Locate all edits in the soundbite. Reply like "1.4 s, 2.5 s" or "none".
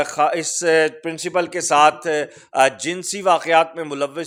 none